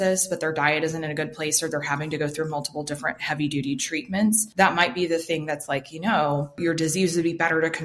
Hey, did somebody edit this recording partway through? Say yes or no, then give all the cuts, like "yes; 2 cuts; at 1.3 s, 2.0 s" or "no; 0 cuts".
yes; 2 cuts; at 4.5 s, 6.6 s